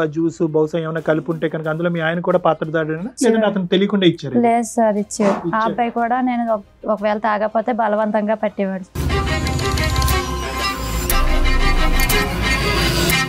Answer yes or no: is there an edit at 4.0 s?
no